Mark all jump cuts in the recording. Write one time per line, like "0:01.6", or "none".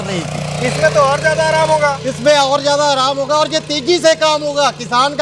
none